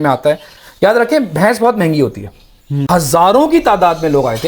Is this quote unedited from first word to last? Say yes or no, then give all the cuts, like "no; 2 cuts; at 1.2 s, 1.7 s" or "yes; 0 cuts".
no; 1 cut; at 2.8 s